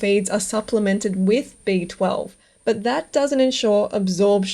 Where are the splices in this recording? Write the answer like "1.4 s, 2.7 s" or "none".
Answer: none